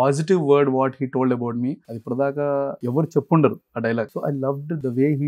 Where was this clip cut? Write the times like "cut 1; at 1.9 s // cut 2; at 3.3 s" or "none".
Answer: cut 1; at 1.9 s // cut 2; at 2.8 s // cut 3; at 4.1 s